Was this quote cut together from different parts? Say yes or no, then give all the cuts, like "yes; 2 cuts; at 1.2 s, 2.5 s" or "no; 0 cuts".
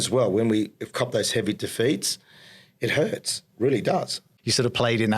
yes; 1 cut; at 4.2 s